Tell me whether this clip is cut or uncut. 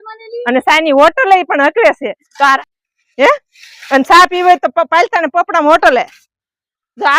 cut